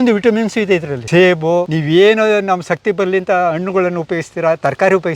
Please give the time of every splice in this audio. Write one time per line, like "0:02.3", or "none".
0:01.0
0:01.7